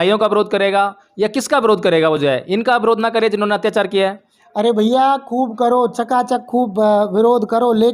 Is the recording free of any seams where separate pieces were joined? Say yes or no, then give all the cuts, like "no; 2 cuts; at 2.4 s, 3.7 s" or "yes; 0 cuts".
yes; 0 cuts